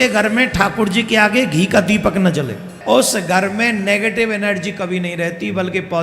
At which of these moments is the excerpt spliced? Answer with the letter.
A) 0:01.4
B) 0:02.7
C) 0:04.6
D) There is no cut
B